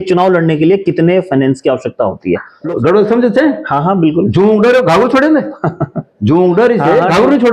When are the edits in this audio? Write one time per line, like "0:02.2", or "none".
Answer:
0:02.5